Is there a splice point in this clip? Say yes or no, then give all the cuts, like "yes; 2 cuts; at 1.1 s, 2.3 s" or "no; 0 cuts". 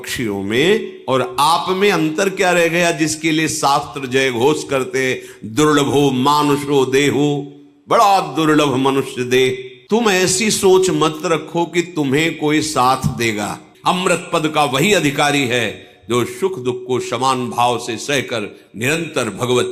yes; 2 cuts; at 9.8 s, 13.7 s